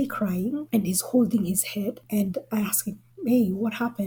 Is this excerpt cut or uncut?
uncut